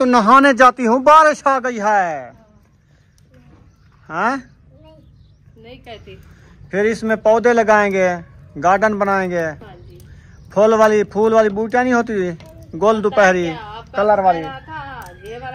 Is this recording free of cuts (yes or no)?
yes